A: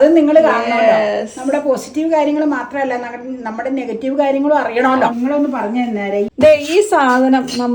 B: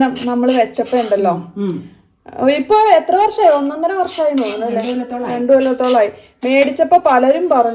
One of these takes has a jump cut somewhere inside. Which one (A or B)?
A